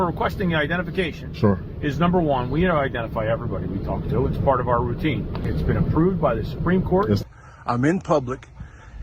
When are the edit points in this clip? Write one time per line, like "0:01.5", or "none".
0:05.4
0:07.2